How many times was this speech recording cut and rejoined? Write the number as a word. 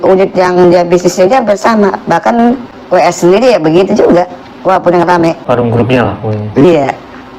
two